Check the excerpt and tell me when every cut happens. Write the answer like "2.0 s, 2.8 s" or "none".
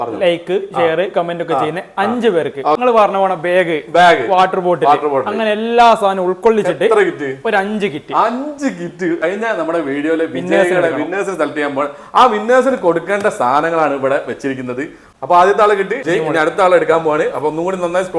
2.8 s, 9.2 s, 15.0 s, 16.0 s